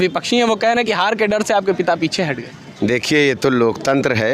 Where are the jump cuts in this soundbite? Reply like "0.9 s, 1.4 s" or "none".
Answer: none